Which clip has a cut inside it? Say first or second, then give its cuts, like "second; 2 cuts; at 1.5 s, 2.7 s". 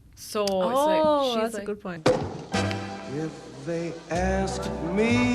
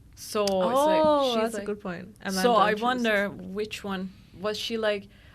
first; 1 cut; at 1.9 s